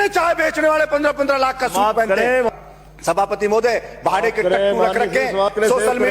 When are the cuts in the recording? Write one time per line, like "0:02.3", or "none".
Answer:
0:02.5